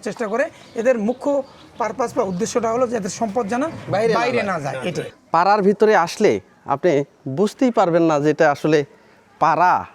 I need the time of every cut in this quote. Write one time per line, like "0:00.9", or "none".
0:05.1

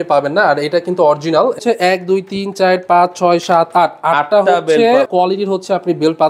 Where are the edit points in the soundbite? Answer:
0:01.6
0:05.1

